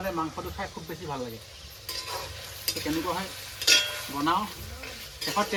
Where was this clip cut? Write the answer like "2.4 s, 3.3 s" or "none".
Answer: none